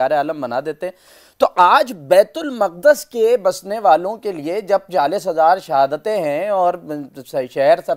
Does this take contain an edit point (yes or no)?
no